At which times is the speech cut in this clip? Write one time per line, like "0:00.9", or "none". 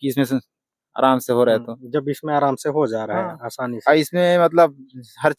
none